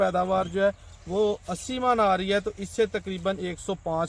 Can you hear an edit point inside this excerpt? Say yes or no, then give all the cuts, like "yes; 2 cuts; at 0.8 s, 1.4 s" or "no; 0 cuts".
no; 0 cuts